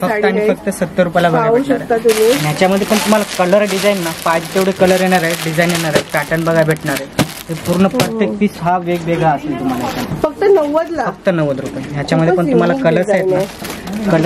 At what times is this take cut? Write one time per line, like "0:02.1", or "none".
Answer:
0:10.1